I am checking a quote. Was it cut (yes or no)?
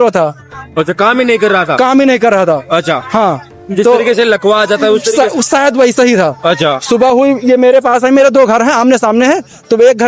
no